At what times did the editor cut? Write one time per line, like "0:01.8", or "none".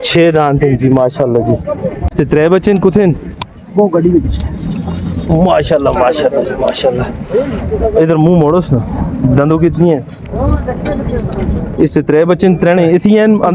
0:02.1